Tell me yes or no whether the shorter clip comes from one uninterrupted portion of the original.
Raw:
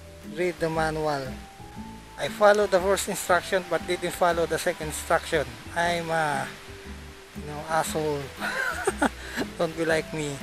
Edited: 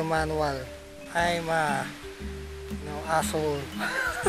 no